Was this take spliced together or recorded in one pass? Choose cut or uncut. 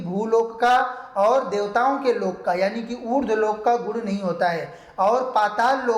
uncut